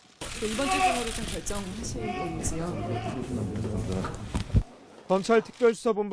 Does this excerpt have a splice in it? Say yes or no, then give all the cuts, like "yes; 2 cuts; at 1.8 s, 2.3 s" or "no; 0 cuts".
no; 0 cuts